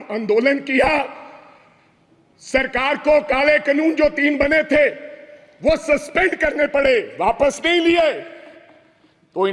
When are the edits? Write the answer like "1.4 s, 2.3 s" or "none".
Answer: none